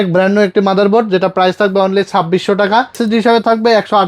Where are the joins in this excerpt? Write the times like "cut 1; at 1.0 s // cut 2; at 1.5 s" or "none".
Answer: cut 1; at 3.0 s